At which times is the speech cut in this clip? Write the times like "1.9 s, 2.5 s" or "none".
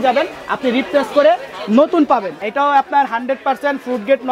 2.4 s